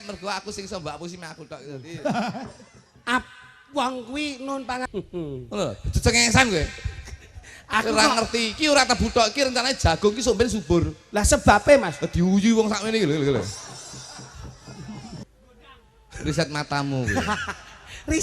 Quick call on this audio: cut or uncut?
cut